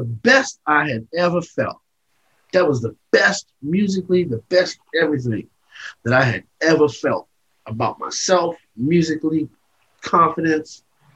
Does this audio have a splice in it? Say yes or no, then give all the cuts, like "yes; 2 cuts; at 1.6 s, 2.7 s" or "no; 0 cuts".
no; 0 cuts